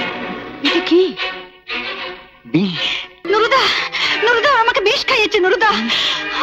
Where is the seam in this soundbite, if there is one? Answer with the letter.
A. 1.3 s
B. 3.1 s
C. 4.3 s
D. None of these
B